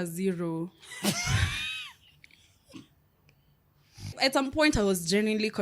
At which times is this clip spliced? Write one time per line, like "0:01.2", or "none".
0:04.1

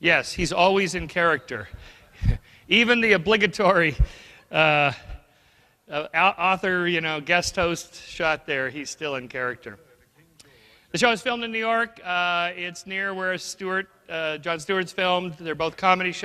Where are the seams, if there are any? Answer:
0:05.7

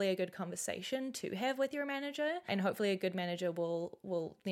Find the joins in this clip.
0:02.5

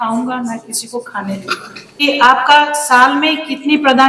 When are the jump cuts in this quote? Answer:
0:02.0

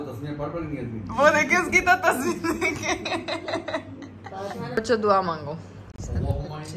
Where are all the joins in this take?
0:04.7

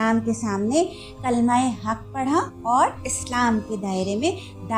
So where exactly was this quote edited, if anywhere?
none

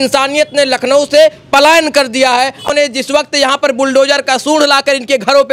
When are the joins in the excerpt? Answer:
0:02.7

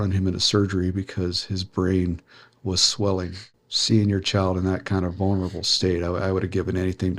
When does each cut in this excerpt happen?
0:03.5

